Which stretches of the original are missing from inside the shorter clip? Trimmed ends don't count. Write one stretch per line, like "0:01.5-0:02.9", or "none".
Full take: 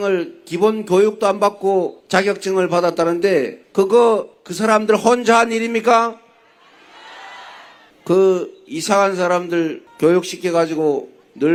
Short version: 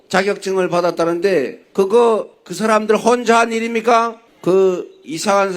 0:06.2-0:07.9